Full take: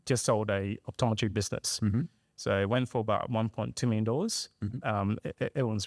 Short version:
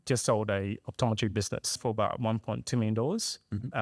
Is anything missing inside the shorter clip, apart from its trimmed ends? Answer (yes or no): yes